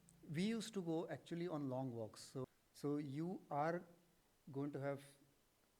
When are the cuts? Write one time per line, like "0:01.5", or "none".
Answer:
0:02.4